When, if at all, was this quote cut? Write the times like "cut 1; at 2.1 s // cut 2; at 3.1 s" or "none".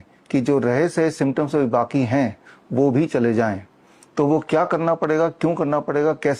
none